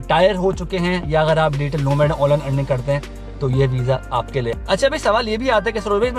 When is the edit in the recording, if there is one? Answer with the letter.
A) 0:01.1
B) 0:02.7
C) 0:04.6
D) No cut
C